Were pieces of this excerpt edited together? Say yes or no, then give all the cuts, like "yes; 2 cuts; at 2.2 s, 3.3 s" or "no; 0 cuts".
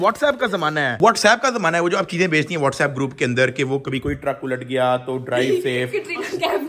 no; 0 cuts